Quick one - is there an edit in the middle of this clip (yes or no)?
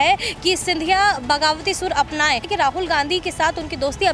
yes